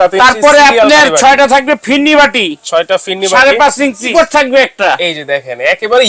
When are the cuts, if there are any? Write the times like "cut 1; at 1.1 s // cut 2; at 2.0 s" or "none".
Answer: cut 1; at 4.1 s